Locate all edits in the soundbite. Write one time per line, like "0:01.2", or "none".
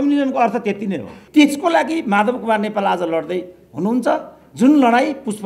0:01.2